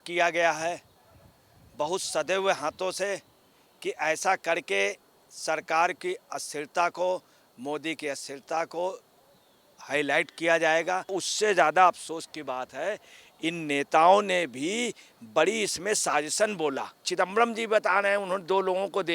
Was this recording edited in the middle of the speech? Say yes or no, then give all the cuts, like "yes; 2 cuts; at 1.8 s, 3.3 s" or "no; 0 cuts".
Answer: yes; 2 cuts; at 11.1 s, 17.1 s